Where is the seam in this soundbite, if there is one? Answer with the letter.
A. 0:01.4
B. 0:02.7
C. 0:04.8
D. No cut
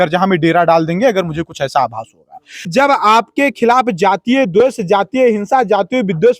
B